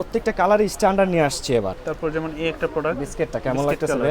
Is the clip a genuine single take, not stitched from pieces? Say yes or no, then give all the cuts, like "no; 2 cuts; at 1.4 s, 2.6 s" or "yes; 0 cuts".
no; 1 cut; at 1.8 s